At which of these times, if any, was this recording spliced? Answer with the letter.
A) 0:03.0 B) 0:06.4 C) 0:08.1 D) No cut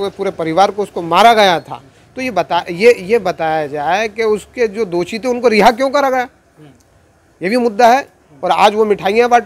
D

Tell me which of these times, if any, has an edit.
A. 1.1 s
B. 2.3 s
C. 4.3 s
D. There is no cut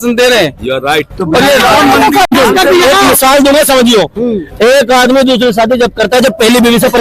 B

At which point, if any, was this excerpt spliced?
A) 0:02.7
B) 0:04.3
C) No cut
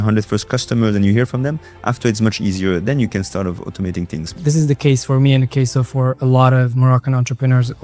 B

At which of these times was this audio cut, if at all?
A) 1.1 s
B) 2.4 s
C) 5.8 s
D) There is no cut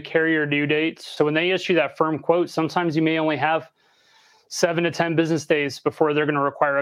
A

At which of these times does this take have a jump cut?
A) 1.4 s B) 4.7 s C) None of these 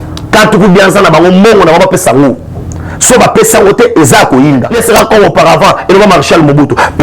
B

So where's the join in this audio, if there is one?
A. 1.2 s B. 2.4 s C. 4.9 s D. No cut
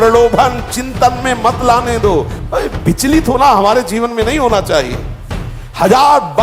B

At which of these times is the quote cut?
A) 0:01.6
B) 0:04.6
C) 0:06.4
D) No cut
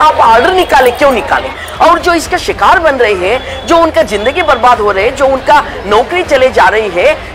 A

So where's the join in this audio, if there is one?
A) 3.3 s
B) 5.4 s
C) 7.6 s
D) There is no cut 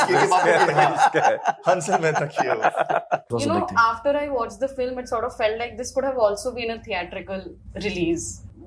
A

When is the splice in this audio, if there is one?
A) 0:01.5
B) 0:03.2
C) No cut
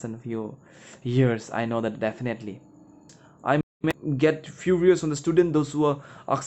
B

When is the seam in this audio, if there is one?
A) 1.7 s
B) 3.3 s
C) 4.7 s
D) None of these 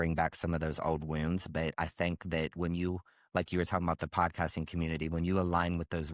D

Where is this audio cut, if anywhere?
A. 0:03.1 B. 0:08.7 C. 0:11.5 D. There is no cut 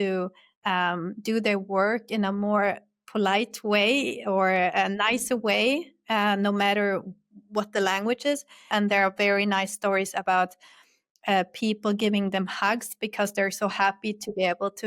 B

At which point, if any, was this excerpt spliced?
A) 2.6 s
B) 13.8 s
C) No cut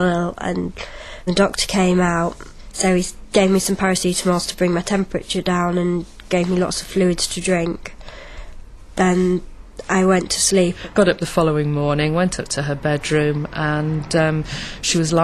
B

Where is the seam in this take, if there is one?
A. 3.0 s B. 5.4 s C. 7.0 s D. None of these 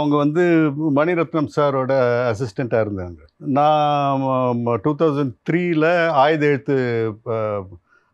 D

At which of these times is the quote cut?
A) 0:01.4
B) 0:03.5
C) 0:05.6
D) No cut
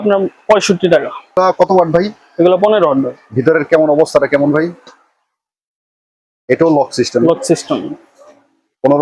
A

